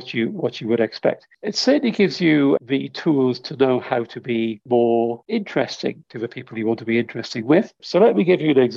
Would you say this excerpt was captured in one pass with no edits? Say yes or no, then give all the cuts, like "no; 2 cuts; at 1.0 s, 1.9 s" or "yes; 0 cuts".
no; 6 cuts; at 1.3 s, 2.6 s, 4.6 s, 5.2 s, 6.1 s, 7.8 s